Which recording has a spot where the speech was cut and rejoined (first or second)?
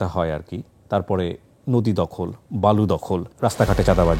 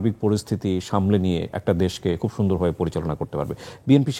first